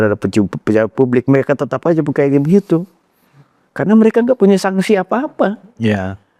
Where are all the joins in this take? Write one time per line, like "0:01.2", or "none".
none